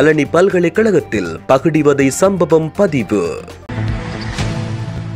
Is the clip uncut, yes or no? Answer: no